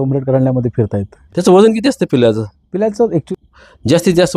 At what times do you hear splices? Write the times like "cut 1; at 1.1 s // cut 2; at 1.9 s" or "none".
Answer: cut 1; at 1.2 s // cut 2; at 3.3 s

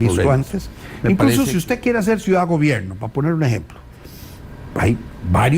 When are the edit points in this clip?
cut 1; at 1.1 s

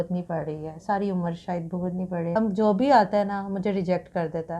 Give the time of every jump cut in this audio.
cut 1; at 2.3 s

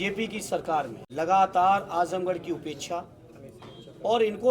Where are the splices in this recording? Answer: cut 1; at 1.0 s

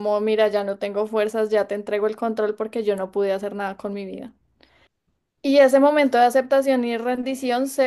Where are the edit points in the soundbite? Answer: none

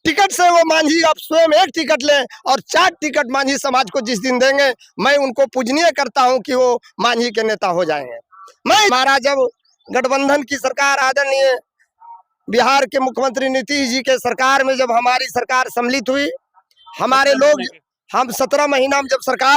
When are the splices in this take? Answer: cut 1; at 8.9 s

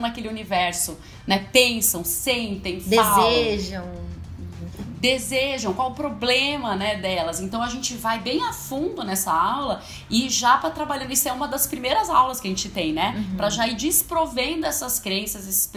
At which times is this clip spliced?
none

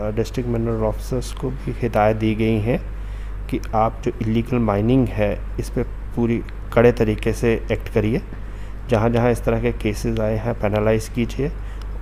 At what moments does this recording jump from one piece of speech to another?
none

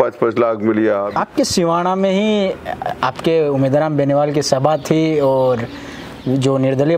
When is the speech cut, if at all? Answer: cut 1; at 1.1 s

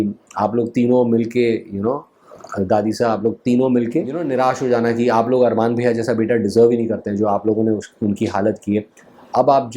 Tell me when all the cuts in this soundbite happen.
cut 1; at 4.2 s

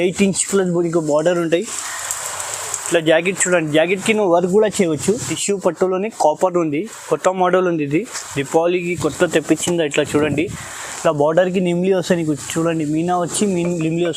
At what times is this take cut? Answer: cut 1; at 5.3 s

